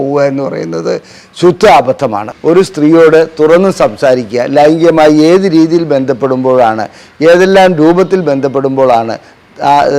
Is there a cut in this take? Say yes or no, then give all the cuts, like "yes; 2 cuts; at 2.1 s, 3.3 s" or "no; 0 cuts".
yes; 1 cut; at 2.3 s